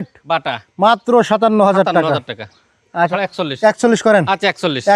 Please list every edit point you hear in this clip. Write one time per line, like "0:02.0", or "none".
0:03.1